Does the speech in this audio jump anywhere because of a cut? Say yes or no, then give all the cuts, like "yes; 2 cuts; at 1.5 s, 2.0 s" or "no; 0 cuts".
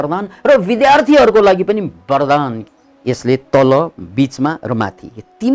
yes; 1 cut; at 2.6 s